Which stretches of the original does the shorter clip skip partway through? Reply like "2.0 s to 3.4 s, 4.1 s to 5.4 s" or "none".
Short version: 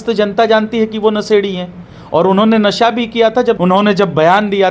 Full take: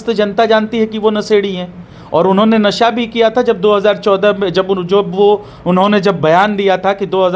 3.6 s to 5.6 s